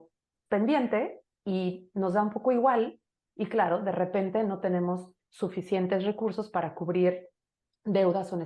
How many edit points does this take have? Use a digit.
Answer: 0